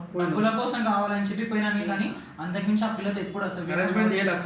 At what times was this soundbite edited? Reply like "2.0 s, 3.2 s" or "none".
none